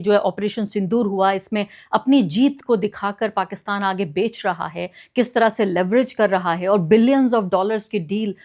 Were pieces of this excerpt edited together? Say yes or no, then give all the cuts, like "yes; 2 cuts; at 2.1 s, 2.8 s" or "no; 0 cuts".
no; 0 cuts